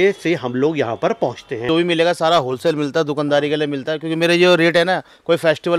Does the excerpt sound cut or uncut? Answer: cut